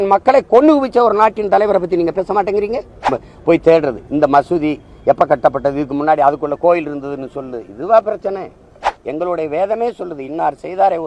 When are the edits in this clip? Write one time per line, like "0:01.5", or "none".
0:03.0
0:09.0